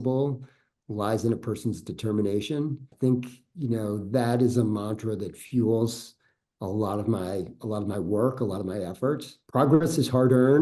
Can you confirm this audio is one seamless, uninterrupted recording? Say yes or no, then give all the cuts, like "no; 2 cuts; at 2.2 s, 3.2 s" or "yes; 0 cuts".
no; 2 cuts; at 2.9 s, 9.3 s